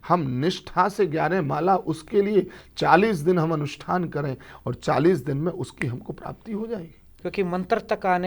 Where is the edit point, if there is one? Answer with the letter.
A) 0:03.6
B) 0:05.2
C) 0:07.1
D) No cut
C